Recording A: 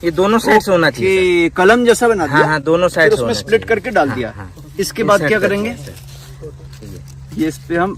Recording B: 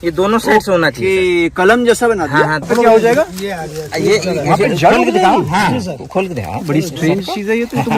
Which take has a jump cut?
B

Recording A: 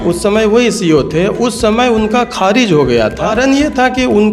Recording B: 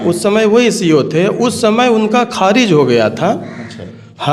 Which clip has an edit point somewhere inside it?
A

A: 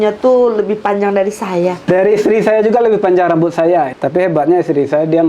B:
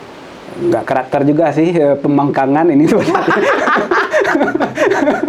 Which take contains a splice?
A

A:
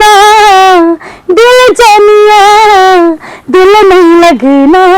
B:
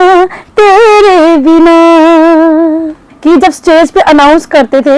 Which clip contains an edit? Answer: B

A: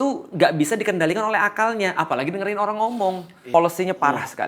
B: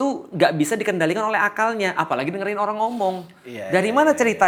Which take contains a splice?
A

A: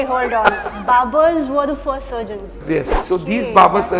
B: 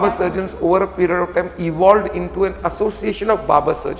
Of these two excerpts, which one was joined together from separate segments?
A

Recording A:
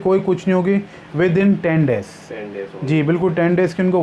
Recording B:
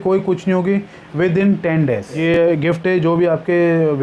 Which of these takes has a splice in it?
B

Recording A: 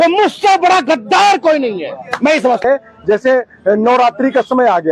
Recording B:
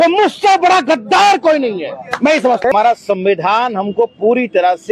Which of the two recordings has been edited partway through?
B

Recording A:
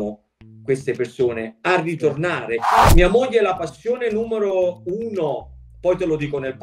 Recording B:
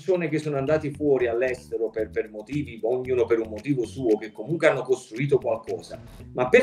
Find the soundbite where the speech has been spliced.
A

